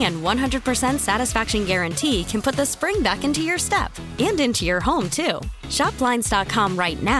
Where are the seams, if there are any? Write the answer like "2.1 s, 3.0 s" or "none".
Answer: none